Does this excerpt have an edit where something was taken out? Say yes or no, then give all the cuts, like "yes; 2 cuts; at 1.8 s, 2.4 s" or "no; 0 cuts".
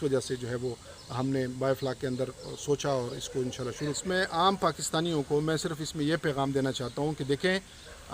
yes; 1 cut; at 4.0 s